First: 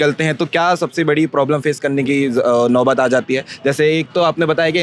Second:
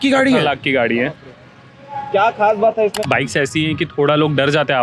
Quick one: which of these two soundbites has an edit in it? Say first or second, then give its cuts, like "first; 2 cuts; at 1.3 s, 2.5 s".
second; 1 cut; at 3.0 s